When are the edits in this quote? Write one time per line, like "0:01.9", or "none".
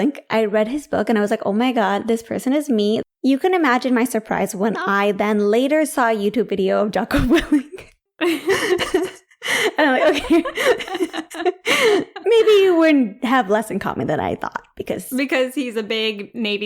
0:03.0